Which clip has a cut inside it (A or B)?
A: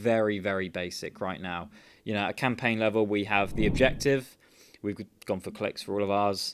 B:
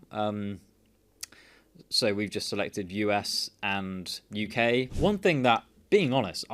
B